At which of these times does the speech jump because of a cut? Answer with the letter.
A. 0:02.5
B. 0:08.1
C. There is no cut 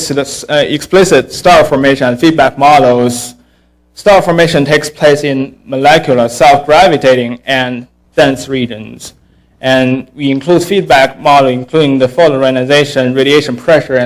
A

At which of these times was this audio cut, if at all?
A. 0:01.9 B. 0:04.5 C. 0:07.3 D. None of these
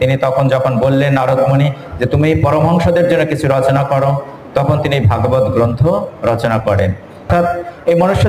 C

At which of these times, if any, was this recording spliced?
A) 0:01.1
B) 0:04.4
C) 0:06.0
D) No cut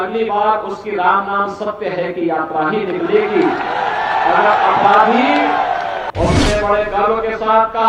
C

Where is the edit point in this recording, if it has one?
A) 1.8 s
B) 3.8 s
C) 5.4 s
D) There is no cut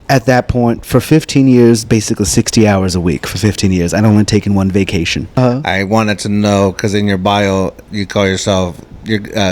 C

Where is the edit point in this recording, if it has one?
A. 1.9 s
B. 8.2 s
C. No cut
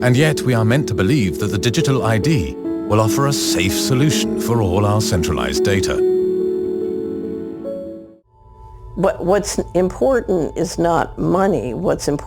B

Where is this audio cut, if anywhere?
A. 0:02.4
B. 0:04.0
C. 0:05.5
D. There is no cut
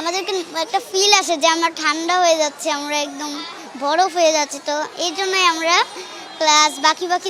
D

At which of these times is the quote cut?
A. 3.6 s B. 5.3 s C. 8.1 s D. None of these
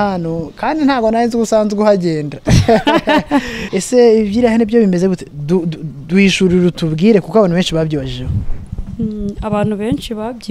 A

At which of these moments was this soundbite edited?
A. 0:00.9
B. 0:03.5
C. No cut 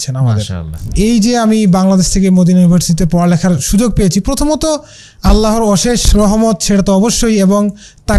A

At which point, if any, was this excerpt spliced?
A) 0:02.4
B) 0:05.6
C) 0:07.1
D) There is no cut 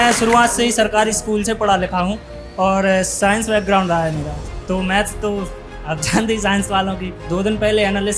C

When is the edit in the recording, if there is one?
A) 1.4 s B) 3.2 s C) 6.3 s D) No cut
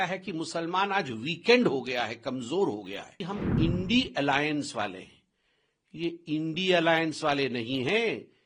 B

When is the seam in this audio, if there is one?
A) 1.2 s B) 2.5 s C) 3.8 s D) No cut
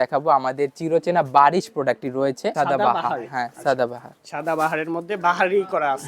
B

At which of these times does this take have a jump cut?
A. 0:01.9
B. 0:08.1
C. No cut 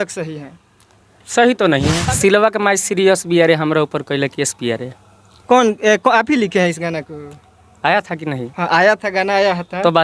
A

